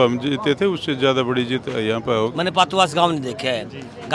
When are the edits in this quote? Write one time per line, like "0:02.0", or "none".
0:02.3